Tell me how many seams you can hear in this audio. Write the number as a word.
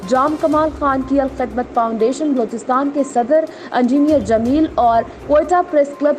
zero